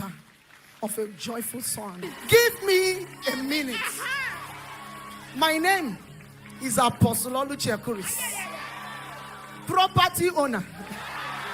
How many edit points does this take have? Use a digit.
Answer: 1